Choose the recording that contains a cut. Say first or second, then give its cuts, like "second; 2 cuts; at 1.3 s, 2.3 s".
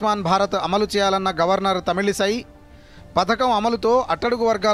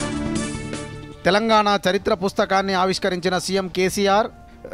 second; 1 cut; at 0.9 s